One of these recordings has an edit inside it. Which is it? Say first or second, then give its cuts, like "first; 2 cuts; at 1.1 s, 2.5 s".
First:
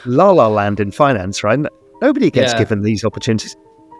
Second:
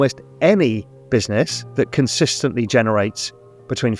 second; 1 cut; at 1.6 s